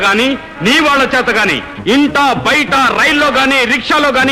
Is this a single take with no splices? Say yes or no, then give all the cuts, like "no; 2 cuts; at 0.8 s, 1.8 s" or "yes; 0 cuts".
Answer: yes; 0 cuts